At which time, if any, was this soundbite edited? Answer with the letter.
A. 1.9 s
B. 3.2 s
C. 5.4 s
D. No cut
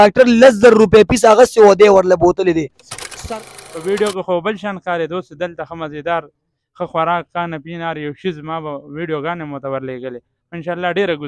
B